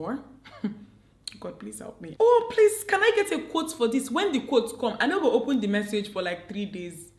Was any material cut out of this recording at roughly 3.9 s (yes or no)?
no